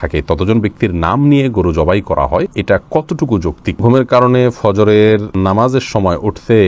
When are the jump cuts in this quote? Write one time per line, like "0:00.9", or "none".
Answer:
0:02.5
0:03.8
0:05.3